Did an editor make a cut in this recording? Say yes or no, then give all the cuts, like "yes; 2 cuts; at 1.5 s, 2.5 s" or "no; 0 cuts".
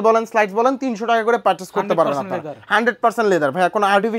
no; 0 cuts